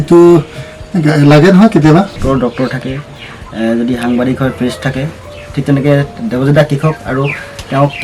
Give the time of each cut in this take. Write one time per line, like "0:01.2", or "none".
0:02.2